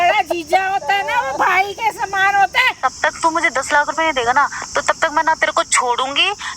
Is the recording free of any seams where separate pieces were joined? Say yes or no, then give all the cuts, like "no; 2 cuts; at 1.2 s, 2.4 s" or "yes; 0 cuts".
no; 1 cut; at 2.7 s